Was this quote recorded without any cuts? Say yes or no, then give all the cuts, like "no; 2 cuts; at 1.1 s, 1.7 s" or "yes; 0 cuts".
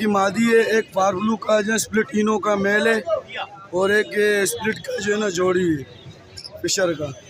yes; 0 cuts